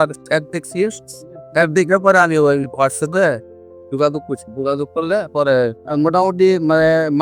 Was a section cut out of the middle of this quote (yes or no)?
yes